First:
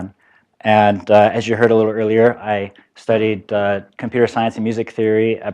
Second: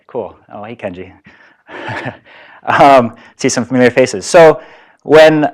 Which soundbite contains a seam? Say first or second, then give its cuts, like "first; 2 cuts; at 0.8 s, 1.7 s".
first; 1 cut; at 2.1 s